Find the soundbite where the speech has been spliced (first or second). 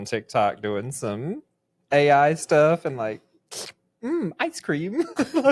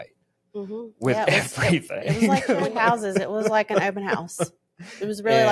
second